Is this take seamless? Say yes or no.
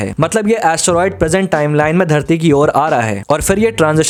yes